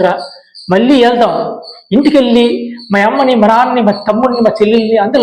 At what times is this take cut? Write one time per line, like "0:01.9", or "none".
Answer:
none